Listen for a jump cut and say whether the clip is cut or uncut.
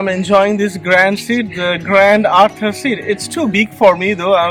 uncut